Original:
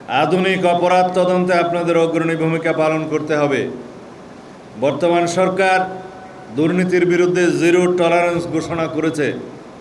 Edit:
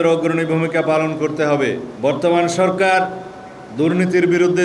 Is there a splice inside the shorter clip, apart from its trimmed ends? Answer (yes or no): yes